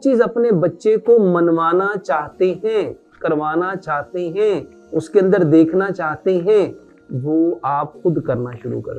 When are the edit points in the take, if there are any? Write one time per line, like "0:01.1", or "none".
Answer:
0:04.8